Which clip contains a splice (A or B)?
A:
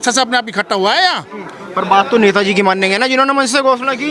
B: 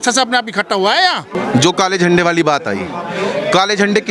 B